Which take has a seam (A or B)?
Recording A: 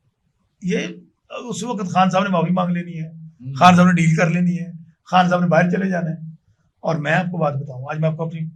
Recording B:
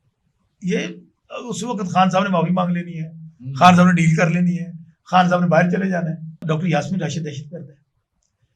B